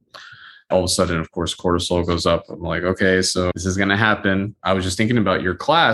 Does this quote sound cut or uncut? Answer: cut